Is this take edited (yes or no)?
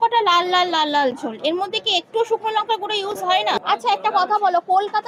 yes